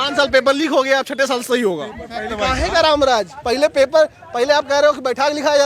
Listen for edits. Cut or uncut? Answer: cut